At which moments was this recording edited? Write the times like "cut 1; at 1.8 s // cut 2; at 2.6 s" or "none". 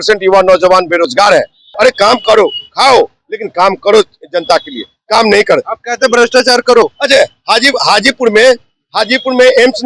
cut 1; at 1.7 s